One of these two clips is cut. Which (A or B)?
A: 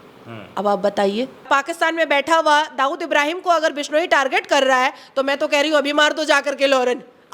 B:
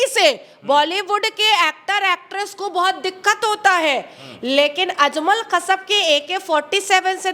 A